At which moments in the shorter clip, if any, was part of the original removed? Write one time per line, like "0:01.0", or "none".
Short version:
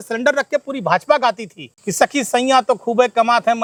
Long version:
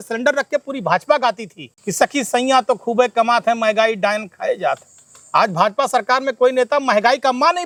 none